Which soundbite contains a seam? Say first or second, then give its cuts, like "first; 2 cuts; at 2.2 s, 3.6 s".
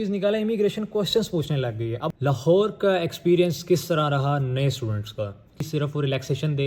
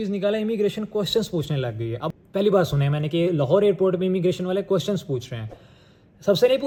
first; 2 cuts; at 2.1 s, 5.7 s